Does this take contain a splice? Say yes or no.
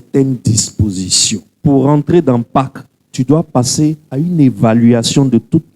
yes